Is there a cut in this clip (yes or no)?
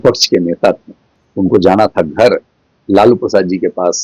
no